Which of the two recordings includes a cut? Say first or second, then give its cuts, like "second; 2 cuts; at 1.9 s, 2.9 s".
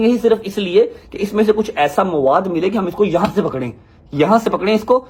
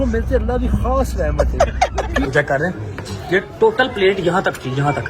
second; 1 cut; at 2.3 s